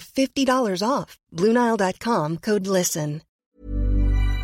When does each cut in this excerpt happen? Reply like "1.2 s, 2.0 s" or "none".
3.5 s